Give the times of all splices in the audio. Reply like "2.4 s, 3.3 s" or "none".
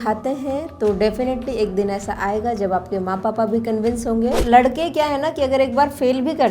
4.4 s